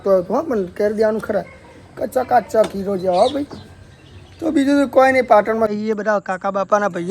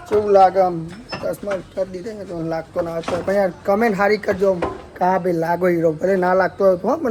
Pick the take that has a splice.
first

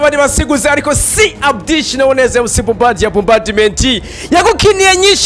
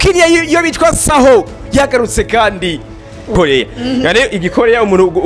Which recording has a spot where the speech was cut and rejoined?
second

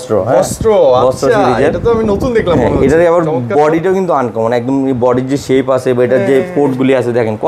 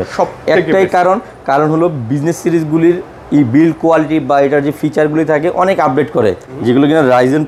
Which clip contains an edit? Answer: second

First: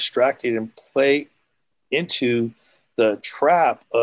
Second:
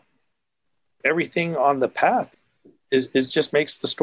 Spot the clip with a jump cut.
second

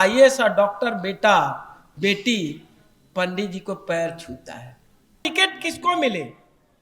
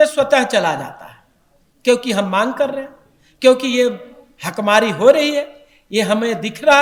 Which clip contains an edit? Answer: first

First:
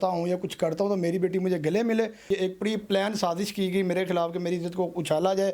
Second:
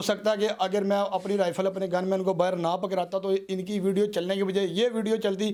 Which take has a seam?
first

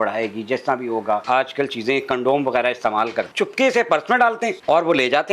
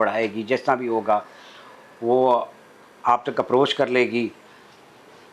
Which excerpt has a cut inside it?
first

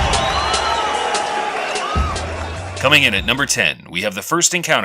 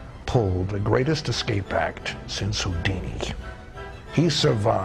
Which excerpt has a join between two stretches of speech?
first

